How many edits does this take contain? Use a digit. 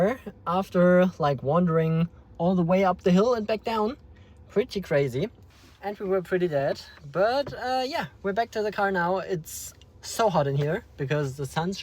1